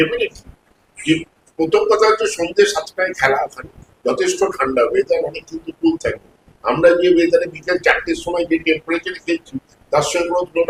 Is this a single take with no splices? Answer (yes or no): yes